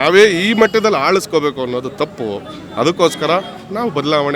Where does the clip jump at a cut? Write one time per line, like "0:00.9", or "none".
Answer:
none